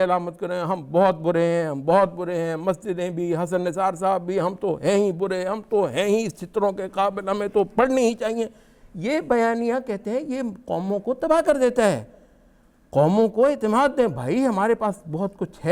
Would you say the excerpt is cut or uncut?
uncut